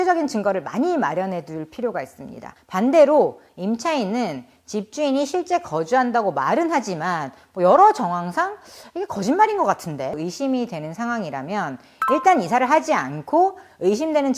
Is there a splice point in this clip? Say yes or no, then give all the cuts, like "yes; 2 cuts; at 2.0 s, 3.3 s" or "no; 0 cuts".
yes; 2 cuts; at 2.4 s, 10.2 s